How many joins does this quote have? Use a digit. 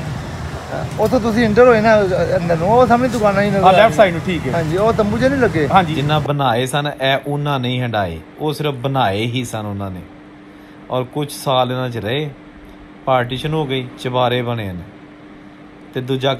2